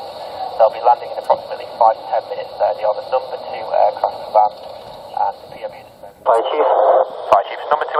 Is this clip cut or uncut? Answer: cut